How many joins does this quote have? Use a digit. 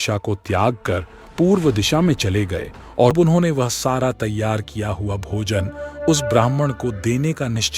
1